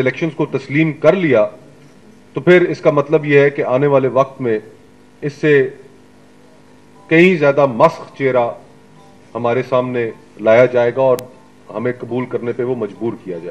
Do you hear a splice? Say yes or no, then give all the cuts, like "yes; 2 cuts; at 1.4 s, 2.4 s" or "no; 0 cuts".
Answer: no; 0 cuts